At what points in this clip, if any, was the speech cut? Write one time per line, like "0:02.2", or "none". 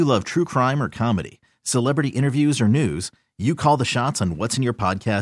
none

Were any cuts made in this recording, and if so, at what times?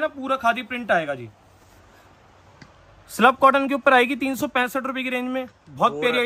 0:01.8

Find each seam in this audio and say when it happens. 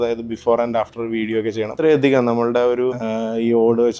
0:01.7
0:03.0

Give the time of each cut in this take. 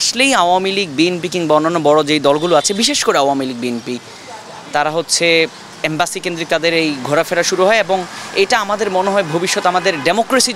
none

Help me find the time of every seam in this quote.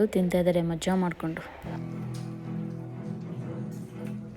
none

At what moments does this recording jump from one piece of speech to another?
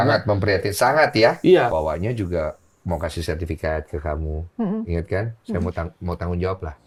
none

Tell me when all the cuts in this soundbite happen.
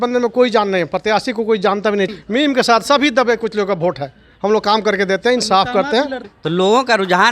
0:02.1
0:06.3

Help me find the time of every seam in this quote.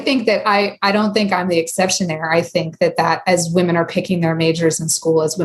none

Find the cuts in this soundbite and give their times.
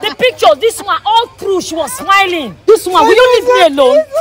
0:02.5

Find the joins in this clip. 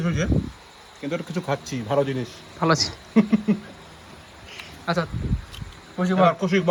none

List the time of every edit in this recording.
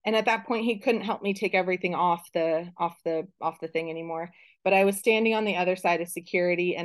none

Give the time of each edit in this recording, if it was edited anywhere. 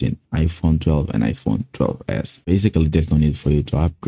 0:02.3

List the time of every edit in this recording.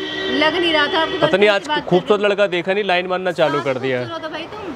none

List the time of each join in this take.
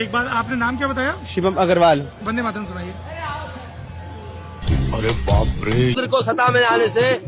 0:06.0

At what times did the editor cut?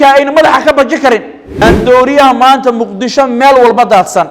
0:01.4

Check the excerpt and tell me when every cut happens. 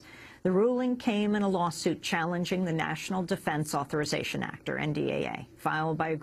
0:04.3

